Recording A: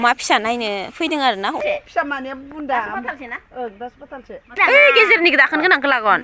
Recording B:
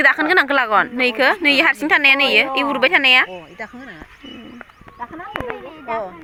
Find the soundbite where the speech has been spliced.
A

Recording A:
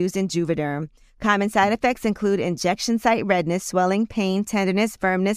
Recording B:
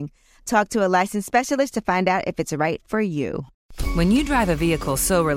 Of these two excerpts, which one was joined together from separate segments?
B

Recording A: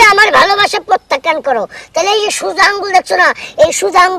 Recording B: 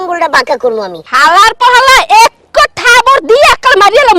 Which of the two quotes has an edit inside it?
B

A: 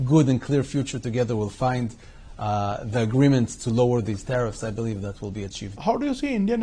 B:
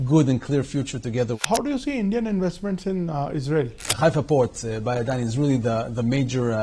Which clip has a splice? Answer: B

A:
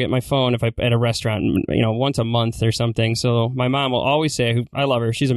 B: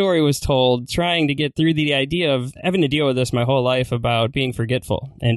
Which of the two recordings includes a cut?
B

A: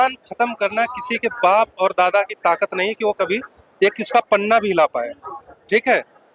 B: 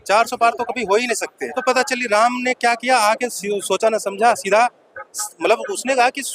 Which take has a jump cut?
B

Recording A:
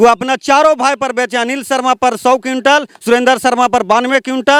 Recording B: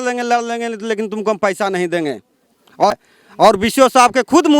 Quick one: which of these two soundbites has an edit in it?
B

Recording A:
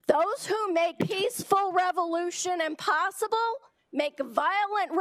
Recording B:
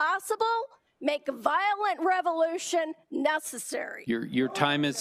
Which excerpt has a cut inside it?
A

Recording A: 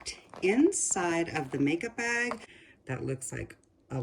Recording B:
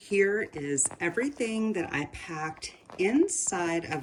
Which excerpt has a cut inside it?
A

